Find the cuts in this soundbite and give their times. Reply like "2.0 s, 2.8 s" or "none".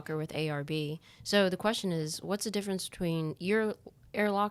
none